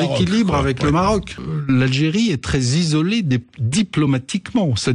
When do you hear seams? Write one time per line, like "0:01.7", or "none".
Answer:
0:01.4